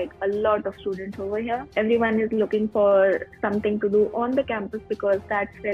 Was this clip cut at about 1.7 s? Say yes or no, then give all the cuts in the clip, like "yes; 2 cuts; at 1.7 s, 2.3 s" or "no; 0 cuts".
yes; 1 cut; at 1.7 s